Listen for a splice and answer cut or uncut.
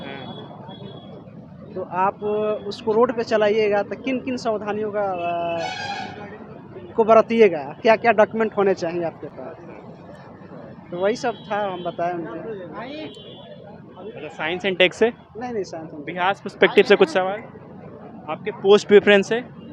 uncut